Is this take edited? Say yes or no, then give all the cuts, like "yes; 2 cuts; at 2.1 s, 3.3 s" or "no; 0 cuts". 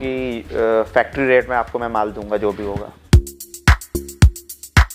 yes; 1 cut; at 3.0 s